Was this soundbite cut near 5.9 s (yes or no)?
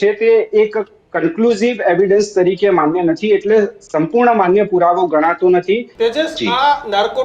yes